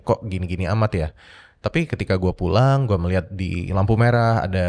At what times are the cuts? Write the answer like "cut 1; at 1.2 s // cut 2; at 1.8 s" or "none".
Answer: none